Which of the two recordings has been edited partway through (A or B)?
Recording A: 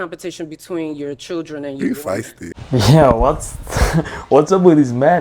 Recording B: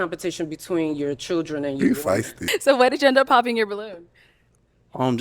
B